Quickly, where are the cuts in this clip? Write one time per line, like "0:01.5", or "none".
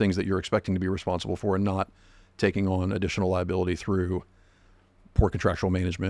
none

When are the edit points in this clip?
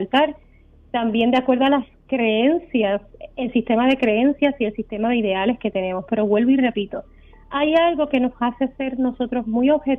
none

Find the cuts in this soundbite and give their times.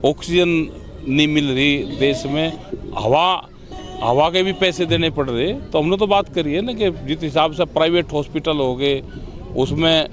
none

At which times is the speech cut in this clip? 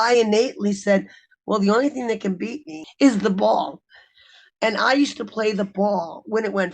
0:02.8

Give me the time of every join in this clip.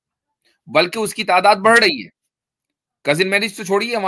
none

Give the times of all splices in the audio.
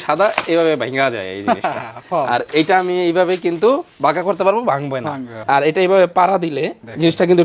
0:05.4

